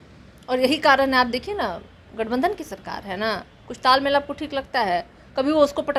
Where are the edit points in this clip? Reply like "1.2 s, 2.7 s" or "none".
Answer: none